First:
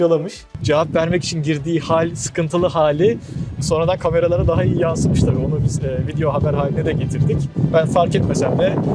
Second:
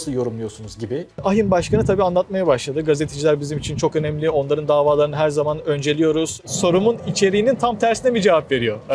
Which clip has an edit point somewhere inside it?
second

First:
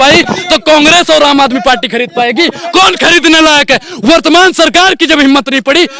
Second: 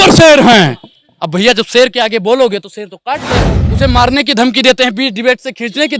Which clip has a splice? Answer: second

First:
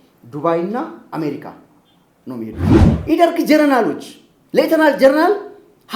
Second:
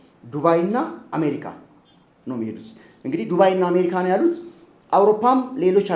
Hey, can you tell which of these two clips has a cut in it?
first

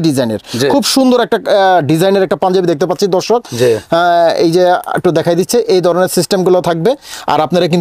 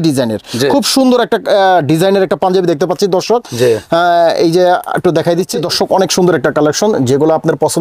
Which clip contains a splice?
second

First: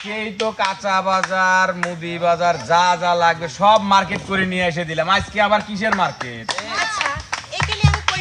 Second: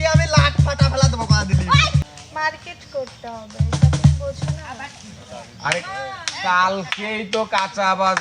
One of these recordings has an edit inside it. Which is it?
second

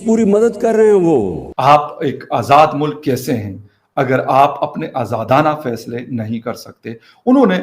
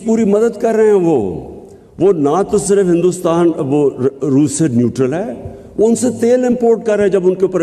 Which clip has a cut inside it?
first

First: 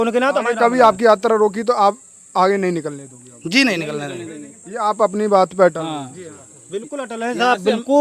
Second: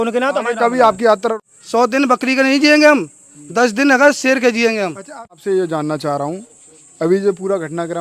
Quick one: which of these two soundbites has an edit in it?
second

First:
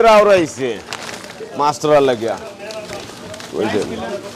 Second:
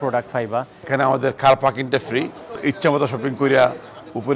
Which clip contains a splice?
second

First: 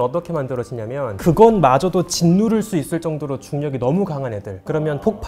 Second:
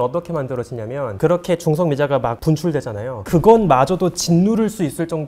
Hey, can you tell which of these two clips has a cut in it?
first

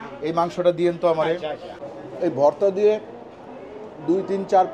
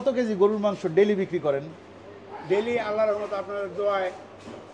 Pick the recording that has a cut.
first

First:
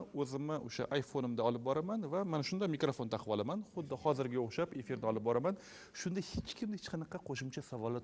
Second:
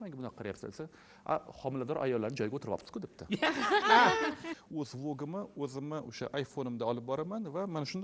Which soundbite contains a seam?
second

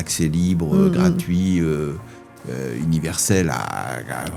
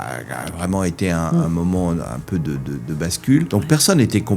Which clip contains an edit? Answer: second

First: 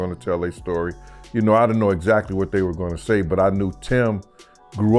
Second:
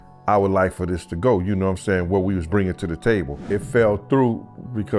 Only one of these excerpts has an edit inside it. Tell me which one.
second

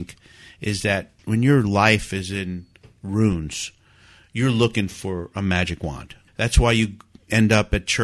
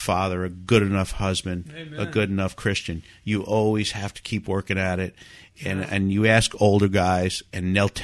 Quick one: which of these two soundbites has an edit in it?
first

